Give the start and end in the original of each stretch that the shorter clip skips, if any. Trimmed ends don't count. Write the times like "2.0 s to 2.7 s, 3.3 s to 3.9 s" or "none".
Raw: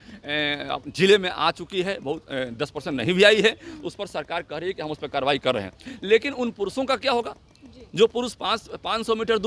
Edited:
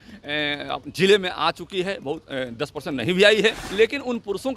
3.6 s to 6.0 s